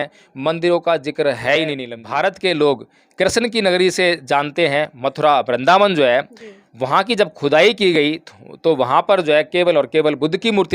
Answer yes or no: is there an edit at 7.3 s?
no